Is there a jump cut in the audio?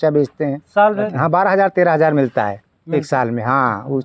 yes; 1 cut; at 1.1 s

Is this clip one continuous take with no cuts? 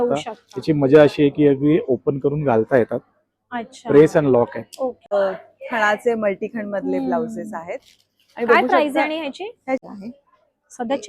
no; 2 cuts; at 5.0 s, 9.8 s

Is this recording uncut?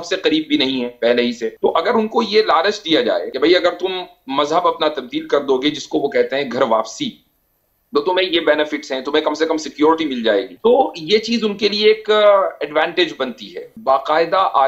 no; 4 cuts; at 1.5 s, 3.3 s, 10.5 s, 13.7 s

